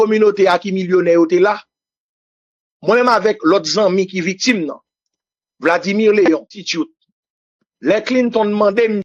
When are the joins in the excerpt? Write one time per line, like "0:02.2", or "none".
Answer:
0:06.6